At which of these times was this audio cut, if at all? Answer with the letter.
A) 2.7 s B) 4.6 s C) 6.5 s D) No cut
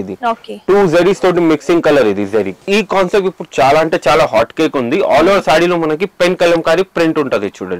A